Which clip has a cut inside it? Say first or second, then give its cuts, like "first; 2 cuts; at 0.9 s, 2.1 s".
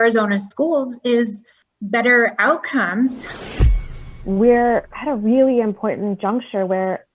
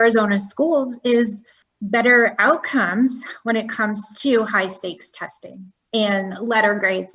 first; 1 cut; at 3.8 s